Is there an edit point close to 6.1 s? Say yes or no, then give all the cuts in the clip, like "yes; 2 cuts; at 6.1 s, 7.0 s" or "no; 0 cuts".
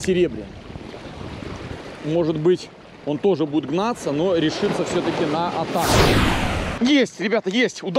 yes; 1 cut; at 6.1 s